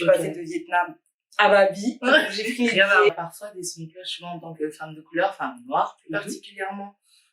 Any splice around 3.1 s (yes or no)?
yes